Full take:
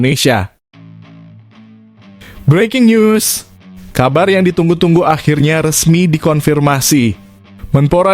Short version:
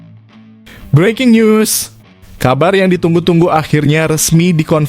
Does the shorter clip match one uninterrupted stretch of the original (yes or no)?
no